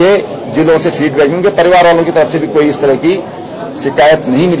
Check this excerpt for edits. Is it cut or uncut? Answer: uncut